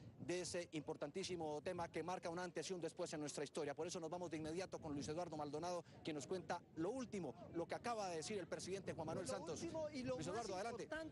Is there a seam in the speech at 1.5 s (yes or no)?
yes